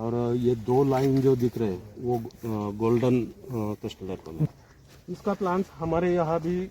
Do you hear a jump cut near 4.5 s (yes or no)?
yes